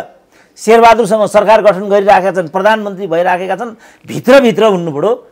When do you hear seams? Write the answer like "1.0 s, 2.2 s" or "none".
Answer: none